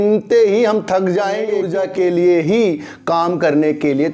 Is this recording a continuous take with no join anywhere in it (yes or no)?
no